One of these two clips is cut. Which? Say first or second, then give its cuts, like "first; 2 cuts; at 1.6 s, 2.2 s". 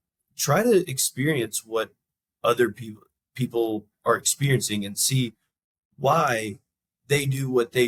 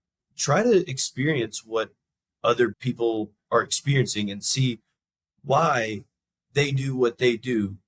second; 1 cut; at 2.8 s